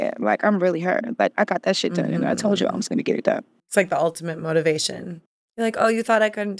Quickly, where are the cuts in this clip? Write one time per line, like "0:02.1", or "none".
0:03.7
0:05.6